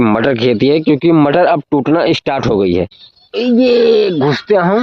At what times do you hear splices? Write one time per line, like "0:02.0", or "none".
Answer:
0:03.4